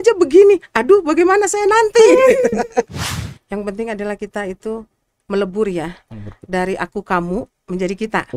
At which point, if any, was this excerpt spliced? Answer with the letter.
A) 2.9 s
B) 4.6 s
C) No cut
A